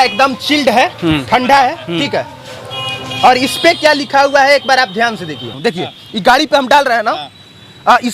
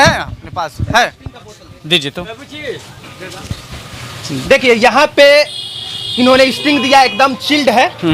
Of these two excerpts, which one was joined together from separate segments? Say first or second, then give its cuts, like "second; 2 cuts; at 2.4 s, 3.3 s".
first; 1 cut; at 5.5 s